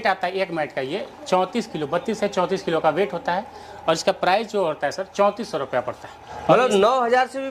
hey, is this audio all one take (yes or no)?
no